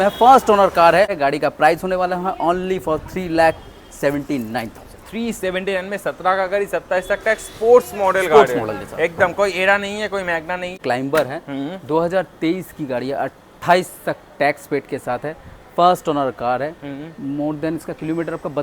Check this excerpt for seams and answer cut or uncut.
cut